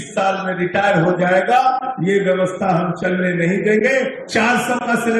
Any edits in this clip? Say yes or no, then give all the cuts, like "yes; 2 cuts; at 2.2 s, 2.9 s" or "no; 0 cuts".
yes; 1 cut; at 4.2 s